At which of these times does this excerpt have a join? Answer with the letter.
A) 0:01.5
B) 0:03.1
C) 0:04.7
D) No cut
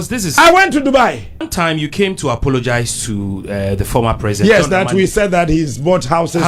A